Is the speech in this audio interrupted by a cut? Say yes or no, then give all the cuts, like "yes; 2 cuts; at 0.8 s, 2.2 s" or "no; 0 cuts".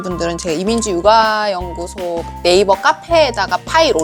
no; 0 cuts